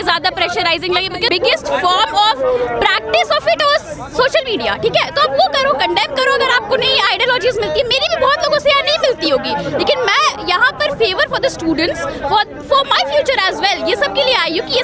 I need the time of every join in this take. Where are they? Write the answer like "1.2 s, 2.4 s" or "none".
1.3 s